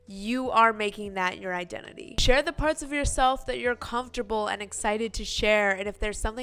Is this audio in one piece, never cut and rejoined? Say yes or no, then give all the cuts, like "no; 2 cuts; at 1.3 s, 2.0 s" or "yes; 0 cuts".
yes; 0 cuts